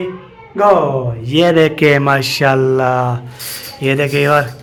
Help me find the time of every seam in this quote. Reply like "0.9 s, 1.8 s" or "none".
none